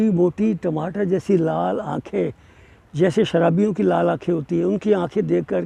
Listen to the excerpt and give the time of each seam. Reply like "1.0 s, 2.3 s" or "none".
none